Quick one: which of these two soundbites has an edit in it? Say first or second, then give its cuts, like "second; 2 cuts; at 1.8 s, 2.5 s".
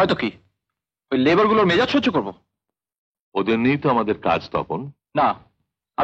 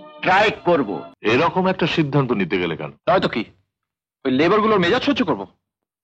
second; 1 cut; at 1.1 s